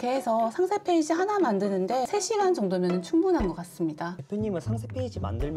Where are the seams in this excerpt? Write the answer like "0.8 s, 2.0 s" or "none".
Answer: 4.2 s